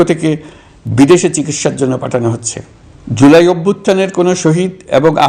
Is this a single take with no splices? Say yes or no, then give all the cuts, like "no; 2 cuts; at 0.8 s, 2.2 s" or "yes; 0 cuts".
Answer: yes; 0 cuts